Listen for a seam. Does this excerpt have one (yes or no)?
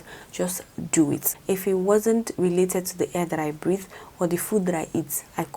yes